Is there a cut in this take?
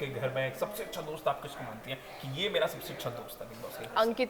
no; 0 cuts

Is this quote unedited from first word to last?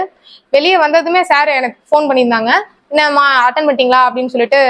yes; 0 cuts

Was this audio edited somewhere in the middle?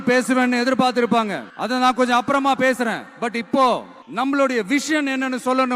yes; 2 cuts; at 1.5 s, 4.0 s

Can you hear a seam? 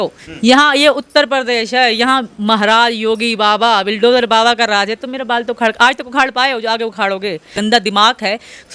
yes; 1 cut; at 7.6 s

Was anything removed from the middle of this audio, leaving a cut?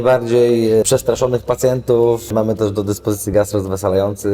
yes; 2 cuts; at 0.9 s, 2.3 s

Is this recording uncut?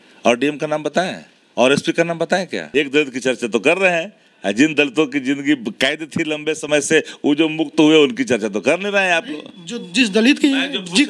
no; 1 cut; at 2.6 s

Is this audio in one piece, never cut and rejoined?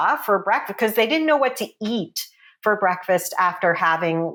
yes; 0 cuts

